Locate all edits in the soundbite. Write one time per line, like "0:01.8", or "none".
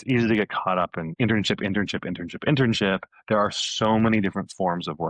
0:01.0